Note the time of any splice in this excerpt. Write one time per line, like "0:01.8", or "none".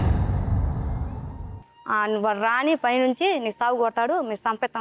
0:01.6